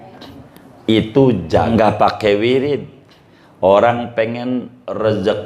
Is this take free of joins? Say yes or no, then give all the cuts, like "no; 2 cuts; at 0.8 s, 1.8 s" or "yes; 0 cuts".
no; 1 cut; at 1.7 s